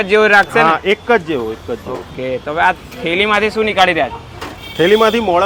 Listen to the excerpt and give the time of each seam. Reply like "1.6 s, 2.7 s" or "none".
none